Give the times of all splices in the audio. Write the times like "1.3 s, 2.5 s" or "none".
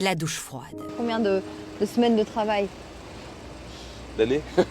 0.9 s